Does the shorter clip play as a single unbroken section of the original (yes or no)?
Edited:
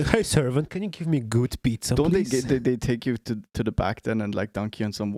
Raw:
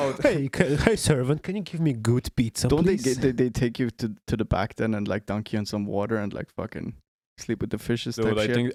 yes